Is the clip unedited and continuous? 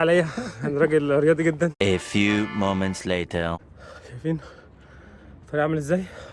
yes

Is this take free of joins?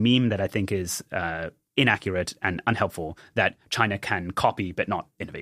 yes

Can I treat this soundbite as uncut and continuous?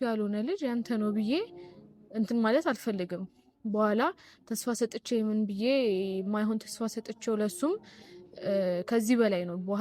yes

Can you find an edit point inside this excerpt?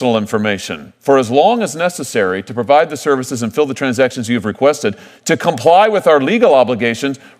no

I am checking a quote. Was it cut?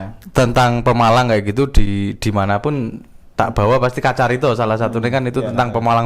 no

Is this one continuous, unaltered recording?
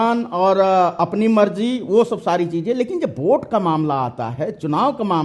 yes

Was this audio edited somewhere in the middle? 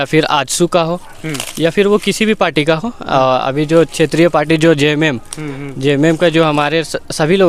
no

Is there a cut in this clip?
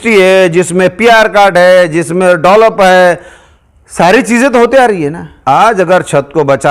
yes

